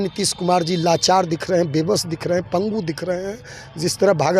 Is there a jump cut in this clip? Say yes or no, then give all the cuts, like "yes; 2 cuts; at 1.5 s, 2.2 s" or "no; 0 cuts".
no; 0 cuts